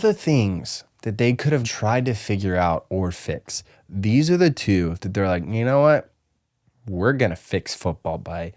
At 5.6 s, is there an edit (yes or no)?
no